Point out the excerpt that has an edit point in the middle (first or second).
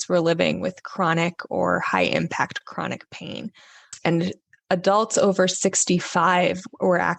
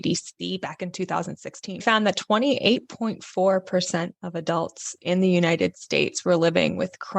second